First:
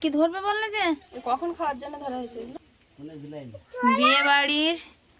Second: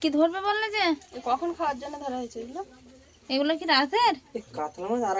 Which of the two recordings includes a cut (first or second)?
first